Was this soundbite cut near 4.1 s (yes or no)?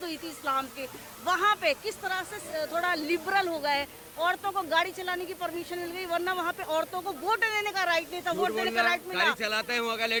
no